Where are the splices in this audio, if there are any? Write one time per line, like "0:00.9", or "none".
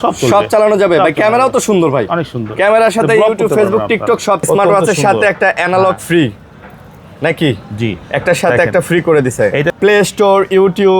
0:04.4
0:09.7